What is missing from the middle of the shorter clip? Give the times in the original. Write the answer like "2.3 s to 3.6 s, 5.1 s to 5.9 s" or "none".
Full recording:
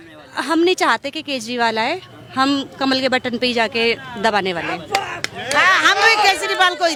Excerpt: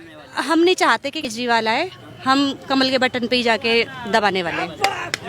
1.3 s to 1.4 s